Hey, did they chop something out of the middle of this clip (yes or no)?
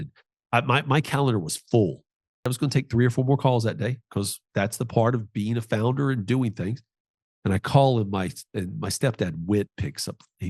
yes